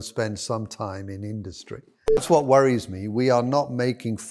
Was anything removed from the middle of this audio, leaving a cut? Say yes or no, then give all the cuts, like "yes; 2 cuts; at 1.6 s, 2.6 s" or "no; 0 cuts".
yes; 1 cut; at 2.2 s